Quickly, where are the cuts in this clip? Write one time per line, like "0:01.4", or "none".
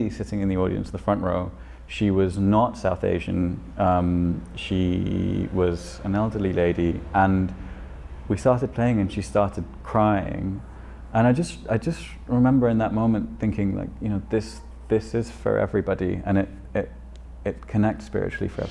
none